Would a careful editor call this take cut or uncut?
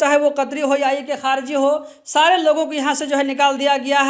uncut